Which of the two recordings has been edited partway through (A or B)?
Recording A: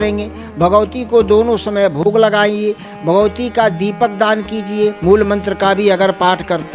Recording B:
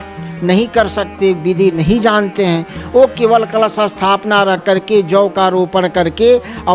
A